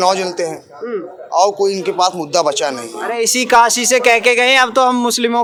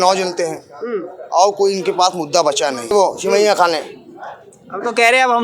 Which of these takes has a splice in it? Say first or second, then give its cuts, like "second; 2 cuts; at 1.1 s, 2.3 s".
second; 1 cut; at 2.9 s